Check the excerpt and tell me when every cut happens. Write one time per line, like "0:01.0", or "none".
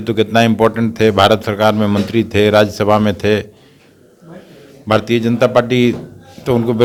none